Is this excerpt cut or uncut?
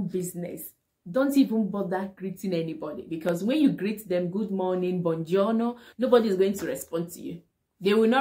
cut